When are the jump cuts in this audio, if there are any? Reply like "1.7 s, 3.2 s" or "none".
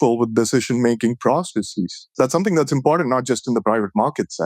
2.0 s